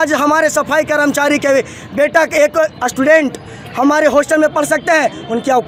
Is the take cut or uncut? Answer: uncut